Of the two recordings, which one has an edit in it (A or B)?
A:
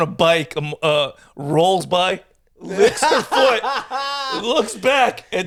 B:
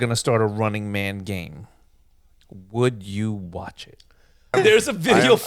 B